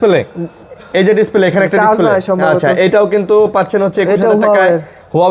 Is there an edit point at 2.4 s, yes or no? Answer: no